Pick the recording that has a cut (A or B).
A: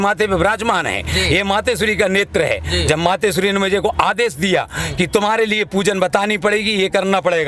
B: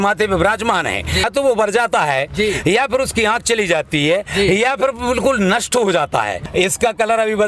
B